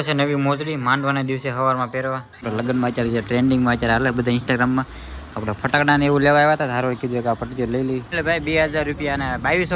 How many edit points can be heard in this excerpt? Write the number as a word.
two